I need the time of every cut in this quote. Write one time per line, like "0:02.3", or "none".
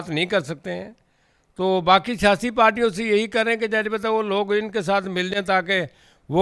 none